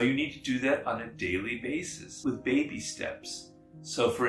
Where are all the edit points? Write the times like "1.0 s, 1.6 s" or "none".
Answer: 2.0 s